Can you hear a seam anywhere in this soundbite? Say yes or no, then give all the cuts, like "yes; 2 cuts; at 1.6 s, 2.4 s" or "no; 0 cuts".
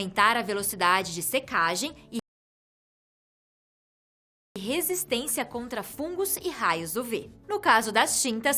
no; 0 cuts